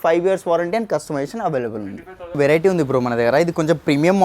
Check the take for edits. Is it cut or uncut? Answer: uncut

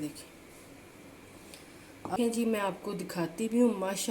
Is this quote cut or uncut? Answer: cut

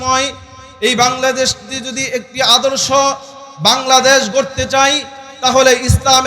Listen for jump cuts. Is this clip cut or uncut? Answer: uncut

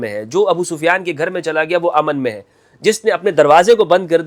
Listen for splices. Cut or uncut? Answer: uncut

